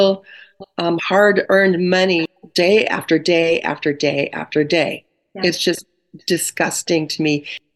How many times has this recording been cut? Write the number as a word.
zero